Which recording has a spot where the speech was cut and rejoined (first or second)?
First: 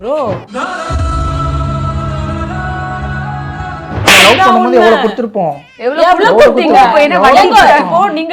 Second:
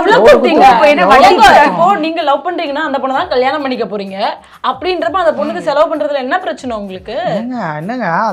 first